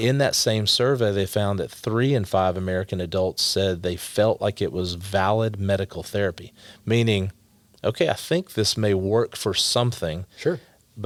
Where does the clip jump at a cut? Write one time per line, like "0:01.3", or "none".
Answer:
none

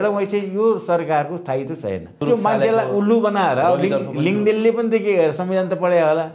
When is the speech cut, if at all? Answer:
0:02.2

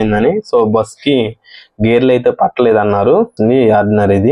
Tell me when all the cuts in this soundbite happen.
0:03.3

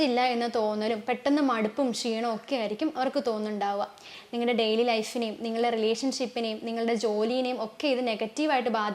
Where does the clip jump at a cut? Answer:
0:04.2

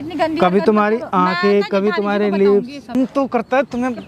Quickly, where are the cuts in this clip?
0:03.0

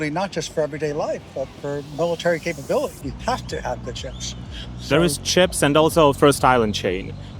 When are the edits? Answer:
none

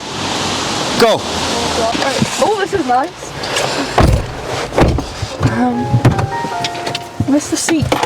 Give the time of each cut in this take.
0:01.9

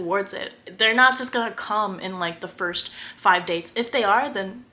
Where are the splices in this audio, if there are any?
none

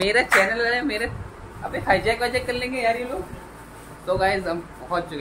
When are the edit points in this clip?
none

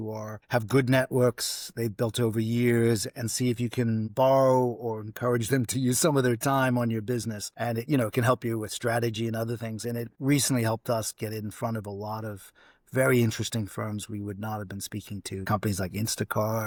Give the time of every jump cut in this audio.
none

